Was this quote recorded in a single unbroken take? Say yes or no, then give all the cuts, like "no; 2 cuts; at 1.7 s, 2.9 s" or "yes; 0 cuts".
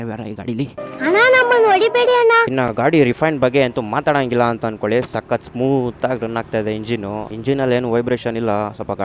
no; 1 cut; at 2.5 s